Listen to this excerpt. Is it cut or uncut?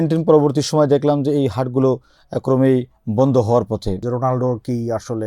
cut